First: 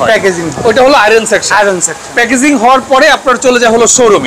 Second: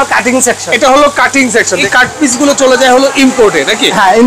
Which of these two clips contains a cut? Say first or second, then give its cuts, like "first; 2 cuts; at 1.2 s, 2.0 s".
second; 1 cut; at 1.7 s